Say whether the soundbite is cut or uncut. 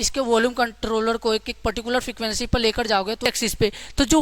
cut